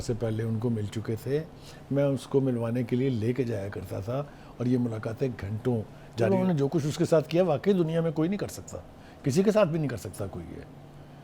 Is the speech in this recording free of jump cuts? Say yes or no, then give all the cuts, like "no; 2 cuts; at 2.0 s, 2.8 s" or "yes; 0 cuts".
no; 1 cut; at 6.3 s